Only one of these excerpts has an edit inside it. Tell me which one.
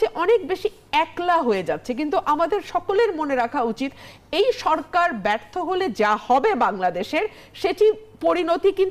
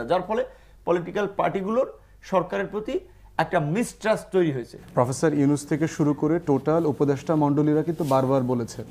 second; 1 cut; at 4.7 s

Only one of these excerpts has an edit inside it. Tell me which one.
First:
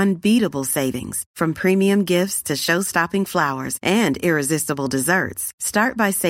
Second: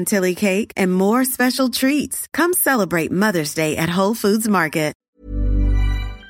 second; 1 cut; at 5.1 s

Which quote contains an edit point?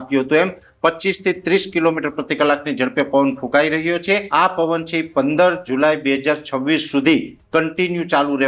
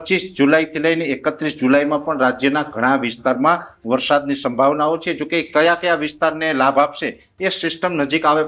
first; 1 cut; at 4.3 s

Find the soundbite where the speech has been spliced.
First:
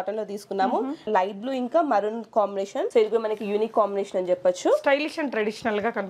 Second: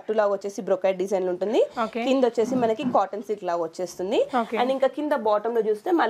first; 2 cuts; at 1.1 s, 2.9 s

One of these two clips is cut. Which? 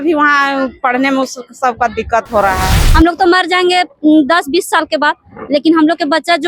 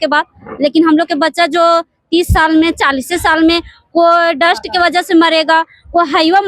first; 1 cut; at 2.8 s

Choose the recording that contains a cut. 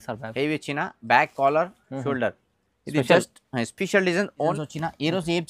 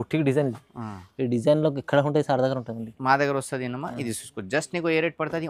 first; 1 cut; at 4.5 s

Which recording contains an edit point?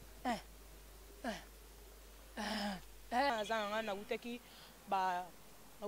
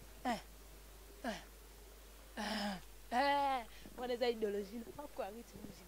first; 1 cut; at 3.3 s

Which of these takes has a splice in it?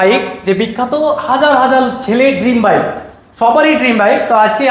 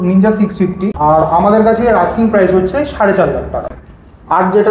second; 2 cuts; at 0.9 s, 3.6 s

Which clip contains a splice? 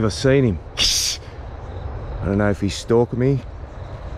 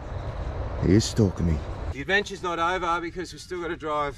second; 1 cut; at 1.9 s

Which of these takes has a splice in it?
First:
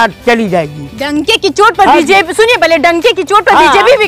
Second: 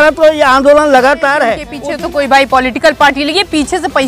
second; 1 cut; at 1.7 s

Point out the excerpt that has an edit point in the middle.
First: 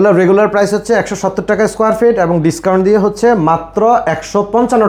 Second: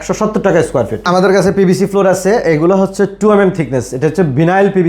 second; 1 cut; at 1.0 s

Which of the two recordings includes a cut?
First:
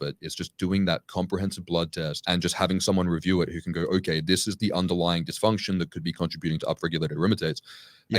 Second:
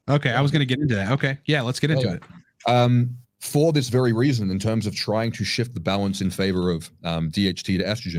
first; 1 cut; at 2.2 s

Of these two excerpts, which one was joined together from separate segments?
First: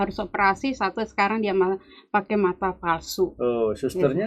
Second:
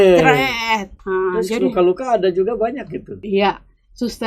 second; 2 cuts; at 0.9 s, 3.1 s

